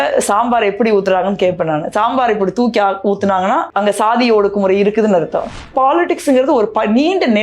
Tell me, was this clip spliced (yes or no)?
yes